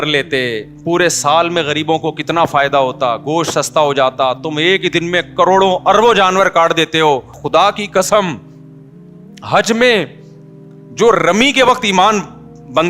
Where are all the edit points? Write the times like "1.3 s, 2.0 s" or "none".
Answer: 7.4 s